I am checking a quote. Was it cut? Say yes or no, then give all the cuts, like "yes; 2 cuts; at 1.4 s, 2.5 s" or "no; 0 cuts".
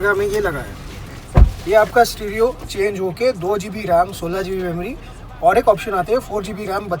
no; 0 cuts